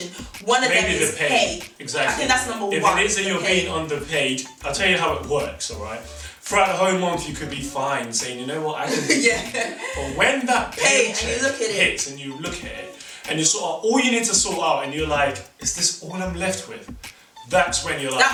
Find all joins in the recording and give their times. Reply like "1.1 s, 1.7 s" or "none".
none